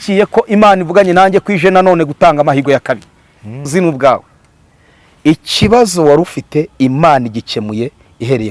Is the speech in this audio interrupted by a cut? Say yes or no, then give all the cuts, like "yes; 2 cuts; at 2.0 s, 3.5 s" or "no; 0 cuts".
yes; 1 cut; at 3.7 s